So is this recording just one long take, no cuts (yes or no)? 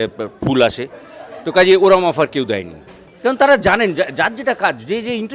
yes